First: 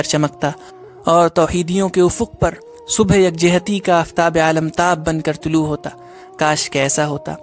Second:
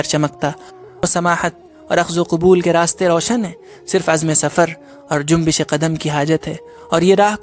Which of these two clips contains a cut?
second; 1 cut; at 1.0 s

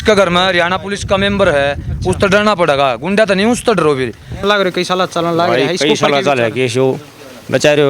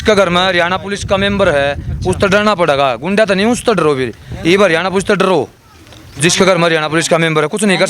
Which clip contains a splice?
first; 1 cut; at 4.4 s

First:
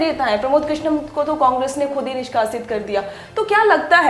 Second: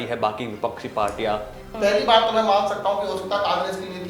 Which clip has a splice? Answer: second; 1 cut; at 1.6 s

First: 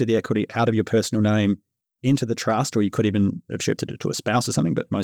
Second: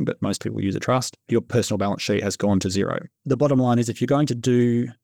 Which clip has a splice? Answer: second; 2 cuts; at 1.3 s, 3.1 s

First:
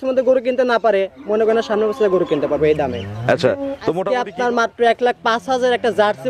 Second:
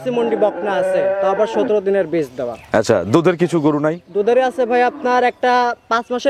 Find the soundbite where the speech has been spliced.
first; 1 cut; at 4.0 s

